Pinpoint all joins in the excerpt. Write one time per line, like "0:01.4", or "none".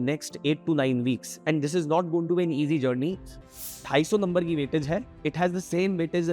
0:03.3